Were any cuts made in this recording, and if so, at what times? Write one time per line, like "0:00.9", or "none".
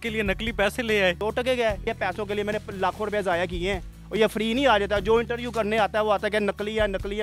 0:01.8